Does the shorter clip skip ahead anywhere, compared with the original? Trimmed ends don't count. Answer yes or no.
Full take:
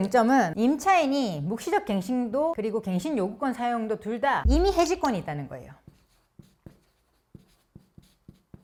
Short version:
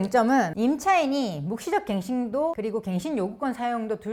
no